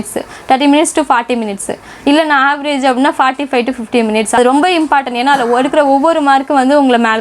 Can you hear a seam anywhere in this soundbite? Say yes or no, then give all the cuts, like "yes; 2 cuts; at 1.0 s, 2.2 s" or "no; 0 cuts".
yes; 1 cut; at 4.4 s